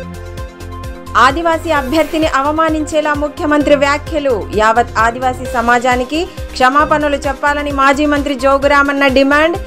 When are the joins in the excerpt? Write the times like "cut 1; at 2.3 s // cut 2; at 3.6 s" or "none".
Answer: none